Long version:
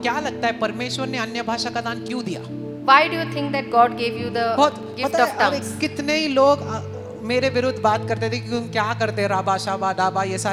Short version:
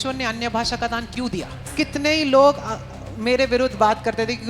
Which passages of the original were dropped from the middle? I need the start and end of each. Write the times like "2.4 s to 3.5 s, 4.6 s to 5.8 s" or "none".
2.6 s to 5.7 s